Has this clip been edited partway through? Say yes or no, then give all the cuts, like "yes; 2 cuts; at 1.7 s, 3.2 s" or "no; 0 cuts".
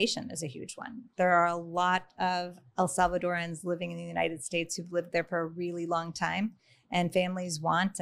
no; 0 cuts